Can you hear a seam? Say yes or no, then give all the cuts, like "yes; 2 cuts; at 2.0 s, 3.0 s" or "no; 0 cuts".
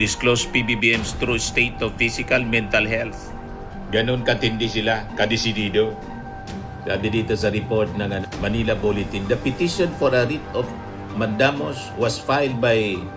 no; 0 cuts